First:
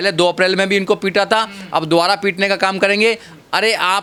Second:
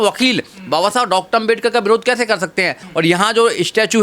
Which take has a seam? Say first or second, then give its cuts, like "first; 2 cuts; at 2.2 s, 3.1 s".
second; 1 cut; at 2.8 s